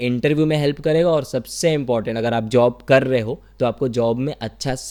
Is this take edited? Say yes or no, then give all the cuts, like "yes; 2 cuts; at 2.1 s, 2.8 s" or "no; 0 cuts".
no; 0 cuts